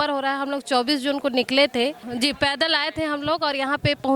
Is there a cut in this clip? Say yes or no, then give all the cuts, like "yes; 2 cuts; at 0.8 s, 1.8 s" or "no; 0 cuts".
yes; 1 cut; at 2.1 s